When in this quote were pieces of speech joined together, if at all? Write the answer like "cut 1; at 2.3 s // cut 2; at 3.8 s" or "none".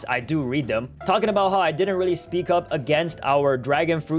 none